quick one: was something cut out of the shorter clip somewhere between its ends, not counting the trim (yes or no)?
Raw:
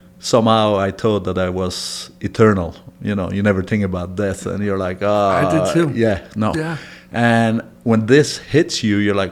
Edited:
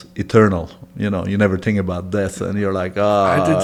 no